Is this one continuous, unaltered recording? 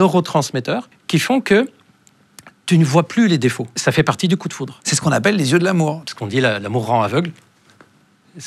no; 3 cuts; at 0.9 s, 3.8 s, 6.1 s

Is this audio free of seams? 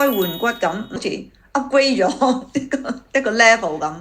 no; 1 cut; at 1.0 s

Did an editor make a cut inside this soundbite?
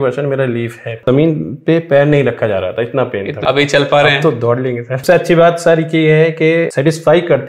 yes; 3 cuts; at 1.0 s, 3.3 s, 5.0 s

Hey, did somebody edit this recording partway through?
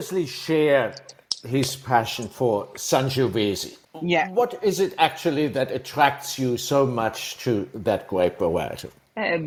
no; 0 cuts

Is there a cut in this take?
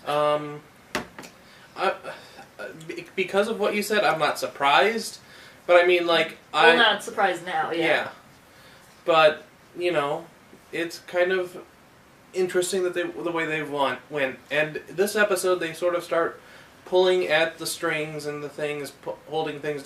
no; 0 cuts

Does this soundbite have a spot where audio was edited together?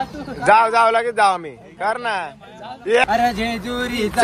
yes; 1 cut; at 3.0 s

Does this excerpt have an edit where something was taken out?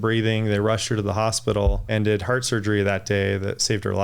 yes; 1 cut; at 1.8 s

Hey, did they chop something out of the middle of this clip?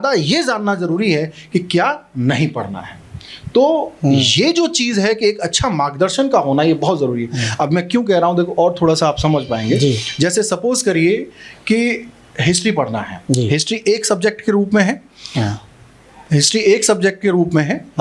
no; 0 cuts

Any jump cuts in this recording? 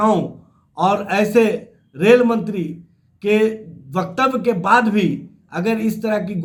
no; 0 cuts

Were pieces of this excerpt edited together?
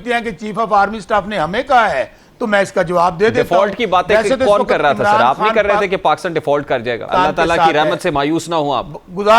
yes; 1 cut; at 7.1 s

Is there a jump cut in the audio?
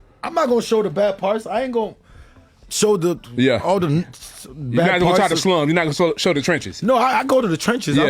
yes; 1 cut; at 2.9 s

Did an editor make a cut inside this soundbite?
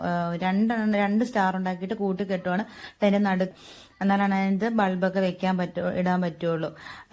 yes; 1 cut; at 3.5 s

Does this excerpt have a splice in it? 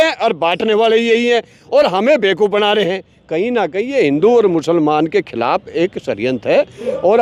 no; 0 cuts

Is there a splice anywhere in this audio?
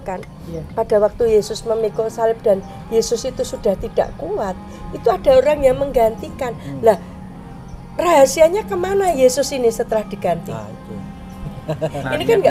no; 0 cuts

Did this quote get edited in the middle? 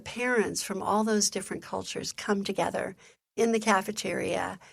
no; 0 cuts

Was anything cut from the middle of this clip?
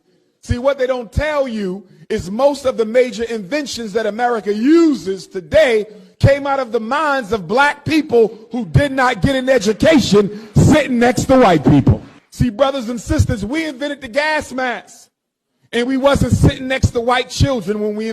yes; 1 cut; at 12.2 s

